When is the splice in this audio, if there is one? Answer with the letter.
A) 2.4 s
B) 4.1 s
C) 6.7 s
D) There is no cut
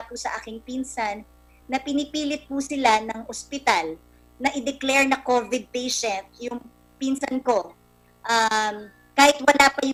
D